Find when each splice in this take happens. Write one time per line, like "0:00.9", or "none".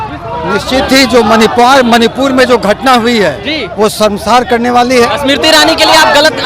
0:05.1

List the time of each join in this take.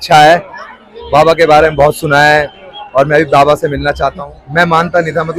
0:04.4

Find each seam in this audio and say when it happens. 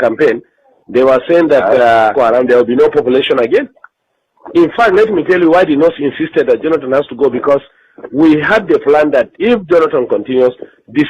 0:02.1

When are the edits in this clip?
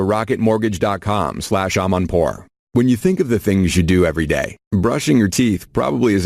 0:02.5

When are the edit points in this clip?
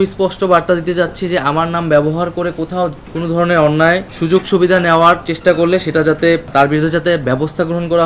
0:03.1
0:04.1
0:06.5

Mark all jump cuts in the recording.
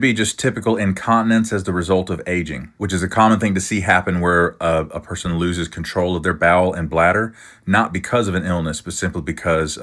none

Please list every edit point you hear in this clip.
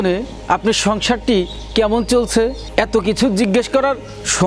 none

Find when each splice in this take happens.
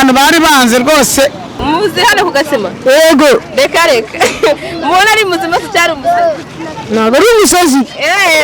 0:01.5

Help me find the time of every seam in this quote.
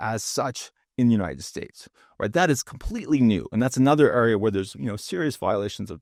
none

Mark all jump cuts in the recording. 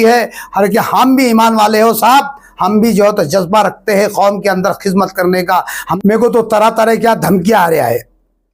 0:05.9

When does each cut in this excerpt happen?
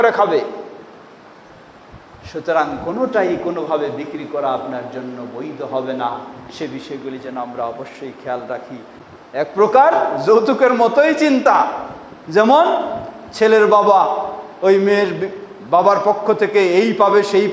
0:09.0

